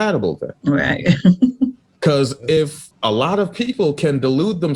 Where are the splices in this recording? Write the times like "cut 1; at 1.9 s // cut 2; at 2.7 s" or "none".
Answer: cut 1; at 2.8 s